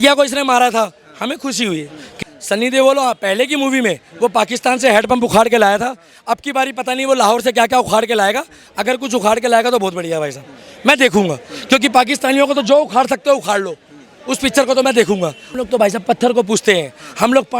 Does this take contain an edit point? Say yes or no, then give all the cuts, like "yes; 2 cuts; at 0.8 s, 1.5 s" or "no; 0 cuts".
yes; 2 cuts; at 2.1 s, 15.5 s